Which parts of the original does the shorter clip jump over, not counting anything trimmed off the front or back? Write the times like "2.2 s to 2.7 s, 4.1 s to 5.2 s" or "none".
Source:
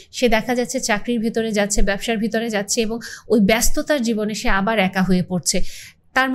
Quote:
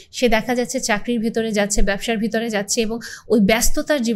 none